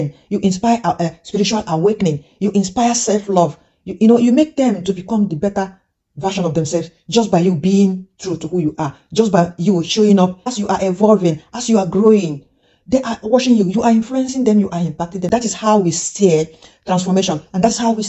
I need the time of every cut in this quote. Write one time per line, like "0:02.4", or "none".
0:10.5
0:15.2